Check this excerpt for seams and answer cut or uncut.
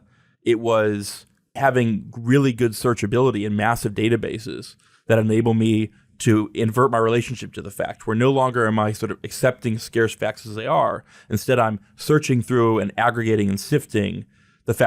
cut